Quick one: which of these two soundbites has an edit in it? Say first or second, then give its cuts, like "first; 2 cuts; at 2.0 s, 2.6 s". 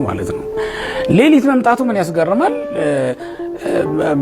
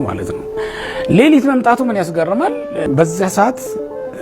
second; 1 cut; at 2.9 s